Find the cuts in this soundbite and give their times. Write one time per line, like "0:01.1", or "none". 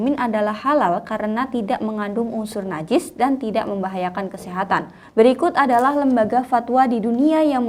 0:04.9